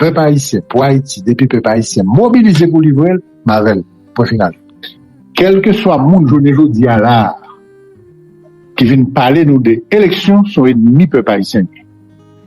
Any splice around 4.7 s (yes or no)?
yes